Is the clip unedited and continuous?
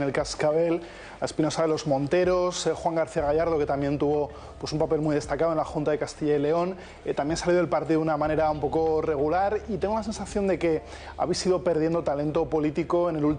yes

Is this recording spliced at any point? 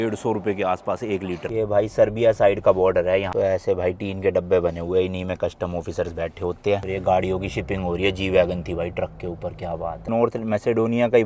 yes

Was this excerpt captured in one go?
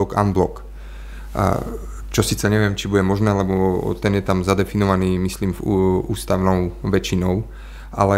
yes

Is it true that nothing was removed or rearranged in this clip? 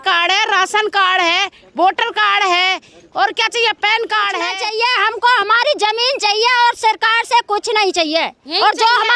no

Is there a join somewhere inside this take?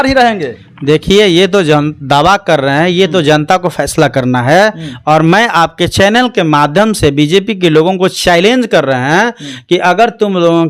no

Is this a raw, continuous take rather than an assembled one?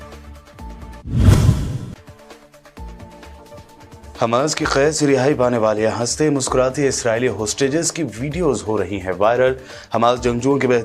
no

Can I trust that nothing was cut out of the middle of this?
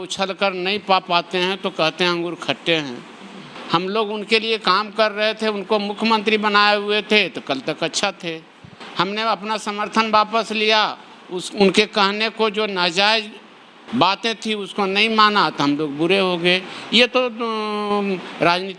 yes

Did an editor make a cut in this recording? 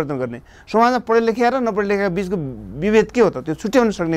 no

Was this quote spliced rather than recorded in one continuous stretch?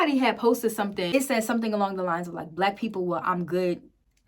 yes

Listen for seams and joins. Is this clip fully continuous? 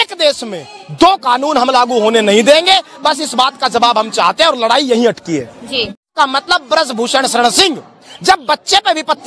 no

